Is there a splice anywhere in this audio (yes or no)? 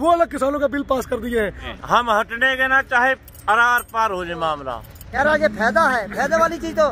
yes